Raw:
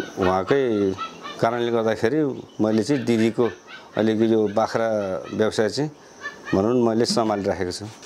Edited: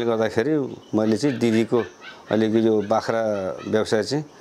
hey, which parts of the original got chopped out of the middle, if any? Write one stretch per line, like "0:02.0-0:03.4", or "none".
none